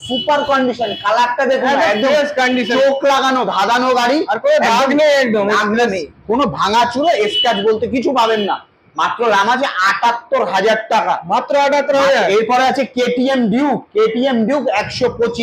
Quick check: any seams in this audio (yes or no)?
no